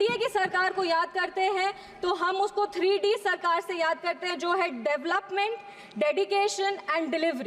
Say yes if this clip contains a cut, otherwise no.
no